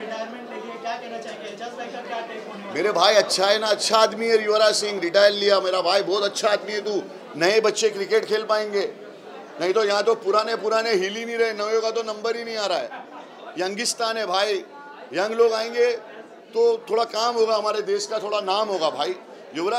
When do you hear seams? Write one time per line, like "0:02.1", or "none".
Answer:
none